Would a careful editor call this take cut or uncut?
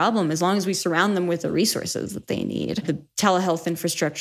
cut